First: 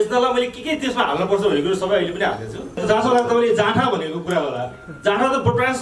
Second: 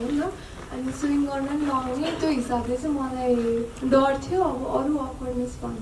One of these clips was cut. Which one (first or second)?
first